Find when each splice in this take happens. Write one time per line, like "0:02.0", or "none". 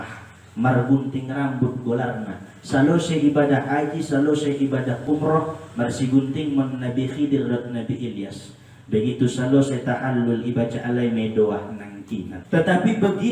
0:12.3